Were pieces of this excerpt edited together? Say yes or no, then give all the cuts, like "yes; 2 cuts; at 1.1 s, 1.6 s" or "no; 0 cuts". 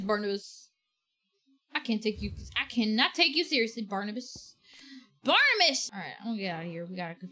yes; 1 cut; at 5.8 s